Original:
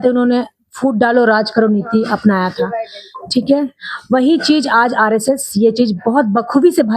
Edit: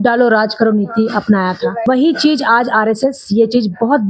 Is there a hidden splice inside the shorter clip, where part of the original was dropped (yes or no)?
yes